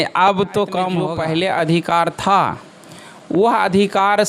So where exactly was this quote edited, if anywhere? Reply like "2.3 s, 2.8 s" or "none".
1.0 s